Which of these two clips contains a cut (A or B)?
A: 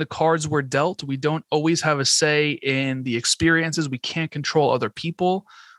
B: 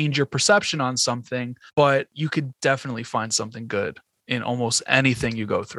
B